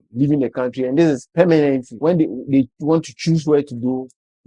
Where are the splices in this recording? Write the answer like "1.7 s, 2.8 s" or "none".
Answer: 1.9 s